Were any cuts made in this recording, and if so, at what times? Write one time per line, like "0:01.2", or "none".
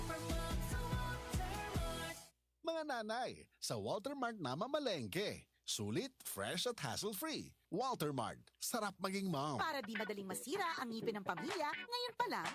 0:09.6